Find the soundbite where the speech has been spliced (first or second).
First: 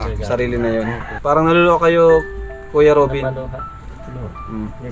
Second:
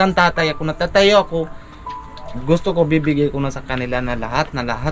first